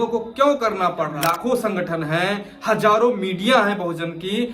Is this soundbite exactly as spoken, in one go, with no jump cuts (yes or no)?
no